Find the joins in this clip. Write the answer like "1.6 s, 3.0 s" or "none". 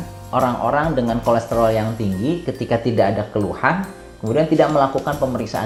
none